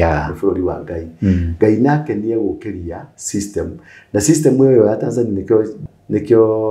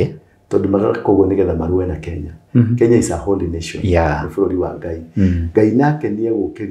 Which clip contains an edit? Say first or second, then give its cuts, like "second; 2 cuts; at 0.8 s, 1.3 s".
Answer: first; 1 cut; at 5.8 s